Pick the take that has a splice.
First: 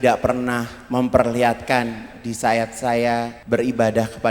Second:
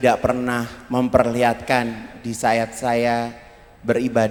first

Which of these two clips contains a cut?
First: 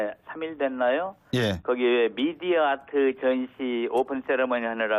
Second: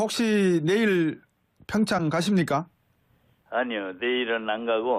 second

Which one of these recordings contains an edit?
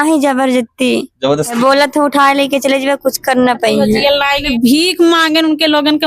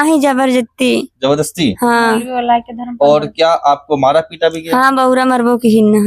first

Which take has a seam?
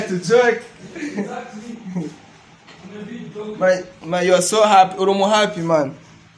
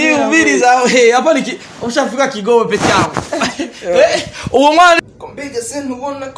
second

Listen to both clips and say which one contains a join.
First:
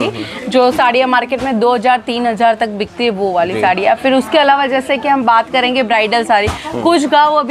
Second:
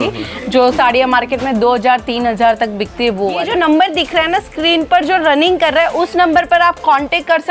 second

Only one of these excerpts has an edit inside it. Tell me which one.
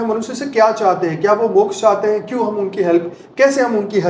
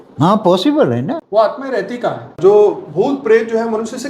second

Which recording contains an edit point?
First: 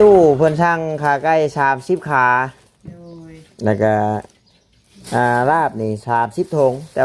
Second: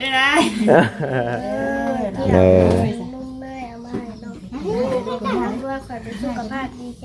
second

